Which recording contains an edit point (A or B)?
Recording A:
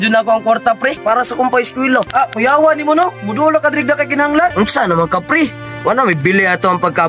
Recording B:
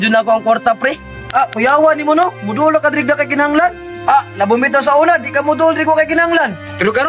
A